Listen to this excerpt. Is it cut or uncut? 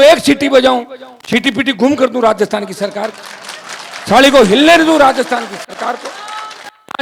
uncut